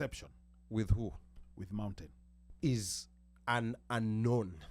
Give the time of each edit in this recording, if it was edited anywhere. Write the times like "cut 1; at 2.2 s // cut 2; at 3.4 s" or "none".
cut 1; at 2.5 s